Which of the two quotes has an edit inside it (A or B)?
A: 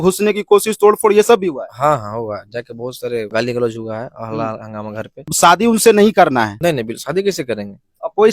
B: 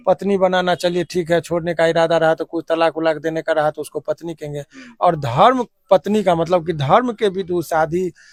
A